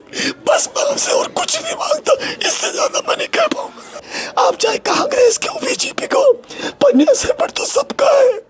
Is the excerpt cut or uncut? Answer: cut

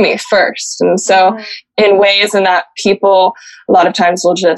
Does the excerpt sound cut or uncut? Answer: cut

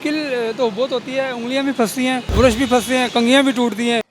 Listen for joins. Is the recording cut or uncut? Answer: cut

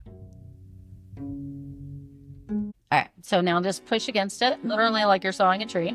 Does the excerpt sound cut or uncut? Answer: cut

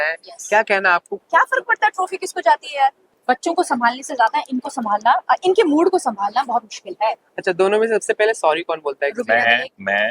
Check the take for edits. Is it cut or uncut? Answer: cut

